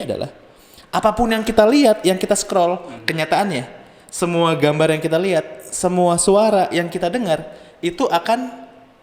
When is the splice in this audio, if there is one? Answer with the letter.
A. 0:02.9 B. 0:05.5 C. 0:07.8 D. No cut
A